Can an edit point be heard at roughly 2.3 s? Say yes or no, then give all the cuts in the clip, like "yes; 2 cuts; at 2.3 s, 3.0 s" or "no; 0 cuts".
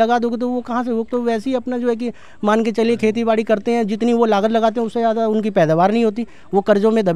no; 0 cuts